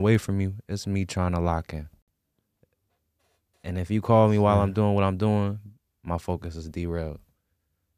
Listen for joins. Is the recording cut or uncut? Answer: uncut